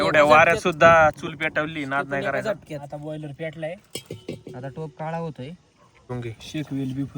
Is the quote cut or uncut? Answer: cut